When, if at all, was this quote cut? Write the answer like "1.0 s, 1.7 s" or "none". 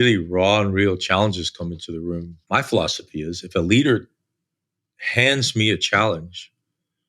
2.3 s